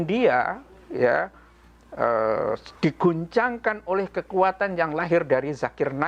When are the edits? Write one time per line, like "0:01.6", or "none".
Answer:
none

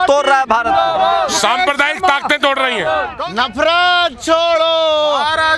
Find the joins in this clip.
0:03.2

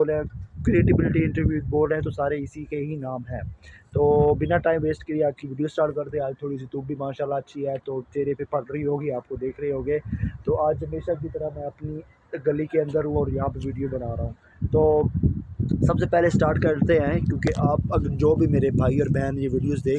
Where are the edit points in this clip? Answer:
none

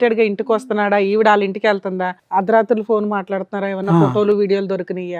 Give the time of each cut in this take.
0:02.1

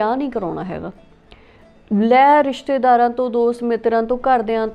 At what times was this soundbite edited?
none

